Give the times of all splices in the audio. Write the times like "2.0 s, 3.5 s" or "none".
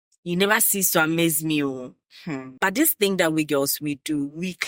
2.5 s